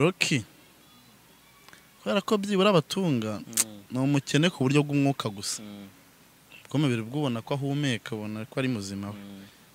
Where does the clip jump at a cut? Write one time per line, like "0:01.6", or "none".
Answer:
none